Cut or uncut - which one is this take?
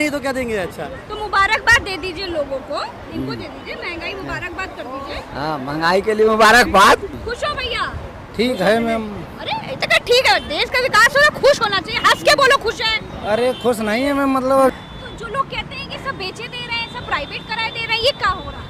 cut